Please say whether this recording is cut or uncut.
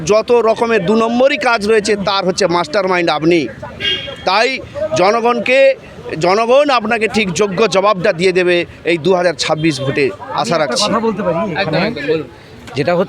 uncut